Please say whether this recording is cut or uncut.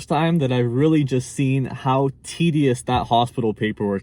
uncut